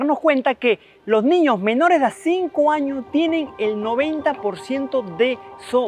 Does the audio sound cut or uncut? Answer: uncut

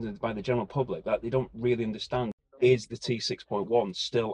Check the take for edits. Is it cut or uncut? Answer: cut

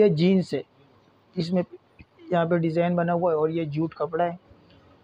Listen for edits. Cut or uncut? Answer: uncut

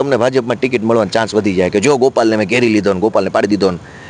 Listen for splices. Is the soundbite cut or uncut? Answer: uncut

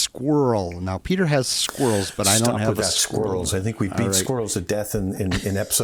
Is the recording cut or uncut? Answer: uncut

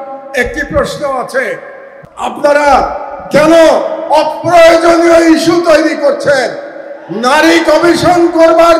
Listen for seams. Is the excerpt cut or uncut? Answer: cut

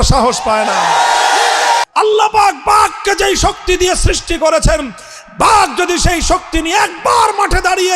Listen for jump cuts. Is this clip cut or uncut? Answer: cut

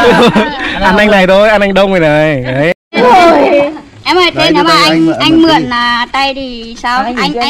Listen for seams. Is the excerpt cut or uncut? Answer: cut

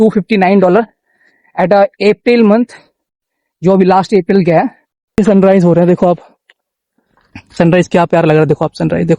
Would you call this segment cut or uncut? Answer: cut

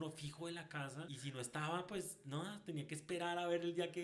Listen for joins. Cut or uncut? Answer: cut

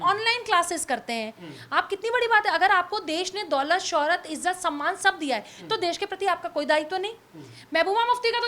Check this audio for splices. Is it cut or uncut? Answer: uncut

